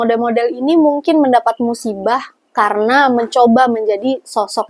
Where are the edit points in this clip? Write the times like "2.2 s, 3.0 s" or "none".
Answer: none